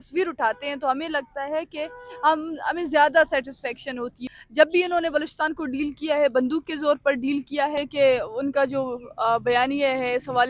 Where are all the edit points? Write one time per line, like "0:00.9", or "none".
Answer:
0:04.3
0:07.8